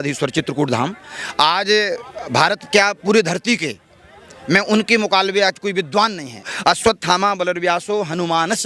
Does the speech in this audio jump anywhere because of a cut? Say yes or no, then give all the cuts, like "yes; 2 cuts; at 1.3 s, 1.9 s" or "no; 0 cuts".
yes; 1 cut; at 6.5 s